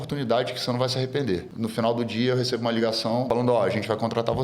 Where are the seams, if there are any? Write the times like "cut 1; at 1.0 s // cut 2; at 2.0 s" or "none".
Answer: cut 1; at 1.5 s // cut 2; at 3.3 s